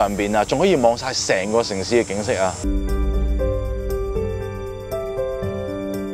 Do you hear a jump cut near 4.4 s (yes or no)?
no